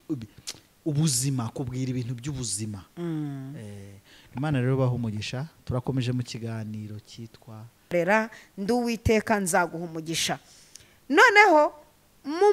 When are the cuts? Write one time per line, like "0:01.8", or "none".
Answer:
0:07.9